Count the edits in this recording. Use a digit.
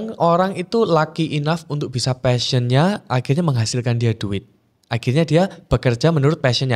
0